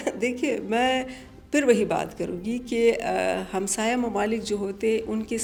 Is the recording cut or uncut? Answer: uncut